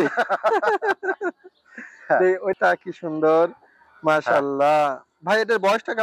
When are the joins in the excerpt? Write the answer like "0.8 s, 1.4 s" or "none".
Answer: 2.6 s